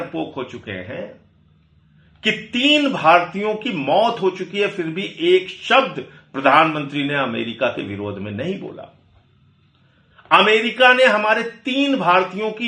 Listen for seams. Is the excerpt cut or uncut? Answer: uncut